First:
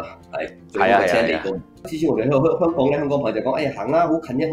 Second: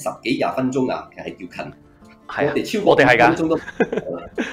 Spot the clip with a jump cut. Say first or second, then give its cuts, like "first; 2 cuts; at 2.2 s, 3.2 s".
first; 1 cut; at 1.9 s